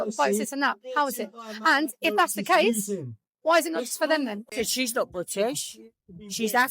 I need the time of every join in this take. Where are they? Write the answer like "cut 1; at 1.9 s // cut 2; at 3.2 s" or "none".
cut 1; at 4.4 s